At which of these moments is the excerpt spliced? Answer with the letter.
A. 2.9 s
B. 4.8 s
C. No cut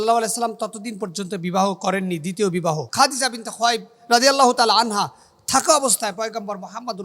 A